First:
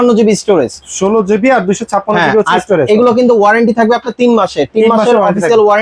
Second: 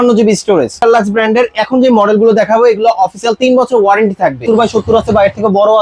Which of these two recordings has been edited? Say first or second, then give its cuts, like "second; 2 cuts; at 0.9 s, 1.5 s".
second; 2 cuts; at 0.8 s, 4.4 s